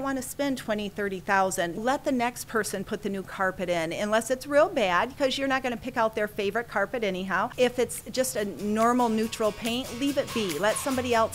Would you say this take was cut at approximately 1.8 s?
yes; 2 cuts; at 1.8 s, 7.5 s

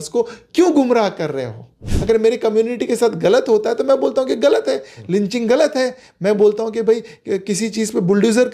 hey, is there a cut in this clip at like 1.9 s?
yes; 1 cut; at 1.9 s

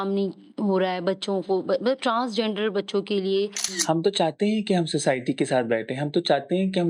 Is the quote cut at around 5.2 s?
no; 1 cut; at 3.7 s

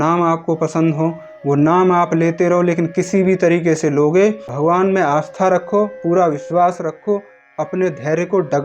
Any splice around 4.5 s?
yes; 1 cut; at 4.5 s

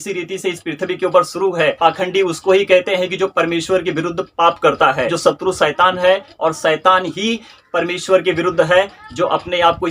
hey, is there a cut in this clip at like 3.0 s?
no; 0 cuts

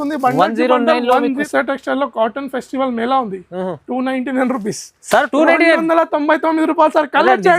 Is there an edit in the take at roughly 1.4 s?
yes; 1 cut; at 1.4 s

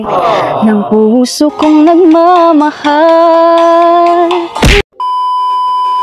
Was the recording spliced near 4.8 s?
yes; 1 cut; at 4.8 s

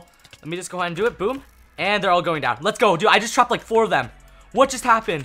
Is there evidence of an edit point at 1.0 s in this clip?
no; 0 cuts

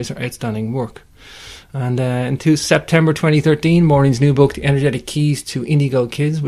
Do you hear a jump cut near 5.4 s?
yes; 1 cut; at 5.4 s

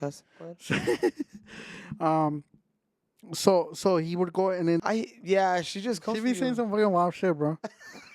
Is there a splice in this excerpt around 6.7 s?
no; 1 cut; at 4.8 s

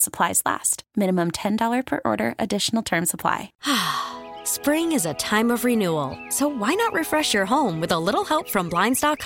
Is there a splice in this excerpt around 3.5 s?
yes; 1 cut; at 3.5 s

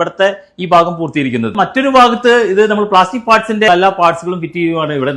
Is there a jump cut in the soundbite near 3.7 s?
yes; 2 cuts; at 1.5 s, 3.7 s

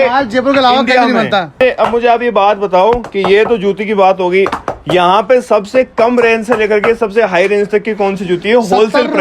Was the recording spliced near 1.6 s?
yes; 1 cut; at 1.6 s

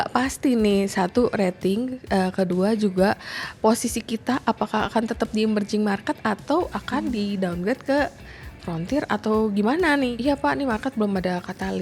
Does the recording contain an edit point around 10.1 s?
yes; 1 cut; at 10.1 s

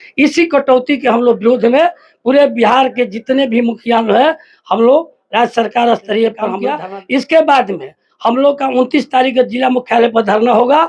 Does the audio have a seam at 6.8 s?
yes; 1 cut; at 6.8 s

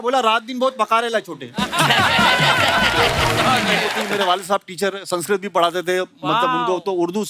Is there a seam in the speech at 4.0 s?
yes; 1 cut; at 4.0 s

